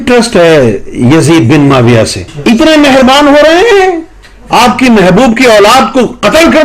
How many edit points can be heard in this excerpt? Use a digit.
1